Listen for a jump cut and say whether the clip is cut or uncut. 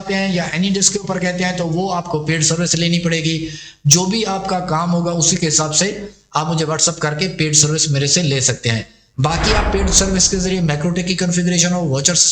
uncut